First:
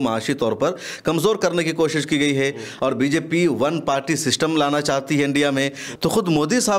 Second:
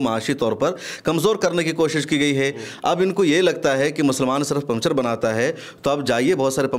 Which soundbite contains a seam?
first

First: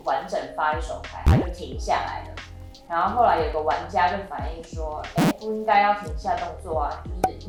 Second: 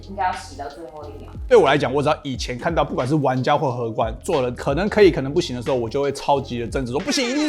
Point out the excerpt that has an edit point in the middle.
second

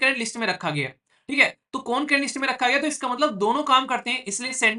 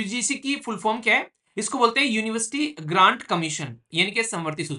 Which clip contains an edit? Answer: second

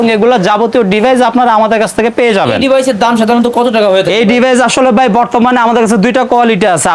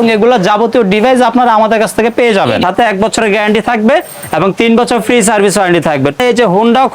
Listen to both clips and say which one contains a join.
second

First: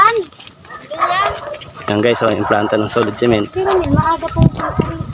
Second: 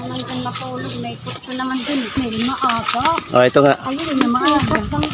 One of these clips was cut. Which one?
second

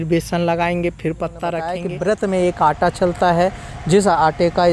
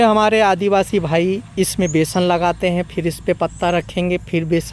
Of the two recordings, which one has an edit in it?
first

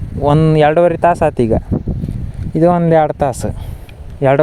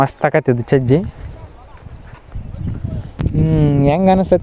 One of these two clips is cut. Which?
second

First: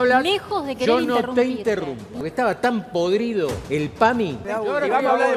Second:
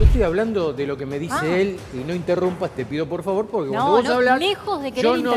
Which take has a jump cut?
first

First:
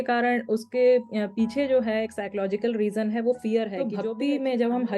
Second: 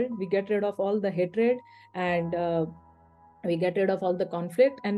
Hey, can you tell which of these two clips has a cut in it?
first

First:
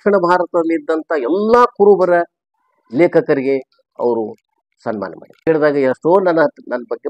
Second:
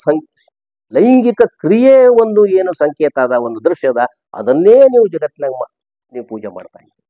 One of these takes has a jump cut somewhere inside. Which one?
first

